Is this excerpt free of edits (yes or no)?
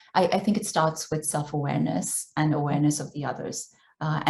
yes